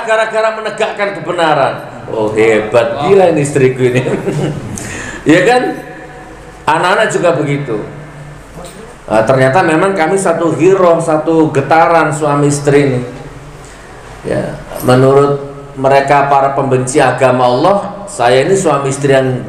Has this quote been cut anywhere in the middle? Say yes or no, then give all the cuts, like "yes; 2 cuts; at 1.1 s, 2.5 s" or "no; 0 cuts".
no; 0 cuts